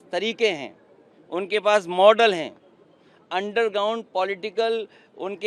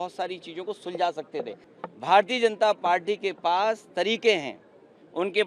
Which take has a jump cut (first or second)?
second